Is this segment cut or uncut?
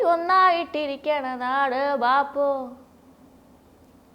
uncut